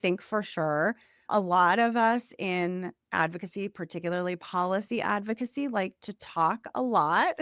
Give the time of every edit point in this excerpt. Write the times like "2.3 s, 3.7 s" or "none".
1.2 s